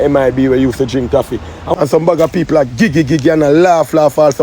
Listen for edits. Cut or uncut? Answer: cut